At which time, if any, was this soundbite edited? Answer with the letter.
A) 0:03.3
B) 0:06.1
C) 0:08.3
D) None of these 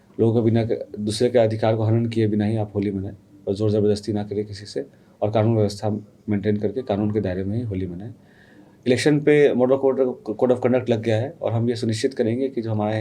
D